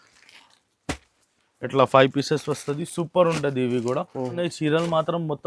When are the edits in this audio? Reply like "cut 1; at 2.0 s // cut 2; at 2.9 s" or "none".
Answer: cut 1; at 4.2 s